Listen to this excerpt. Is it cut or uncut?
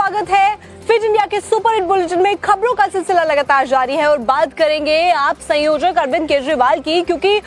uncut